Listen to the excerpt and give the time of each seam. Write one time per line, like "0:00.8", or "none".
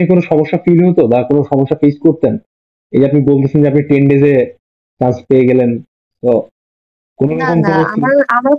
none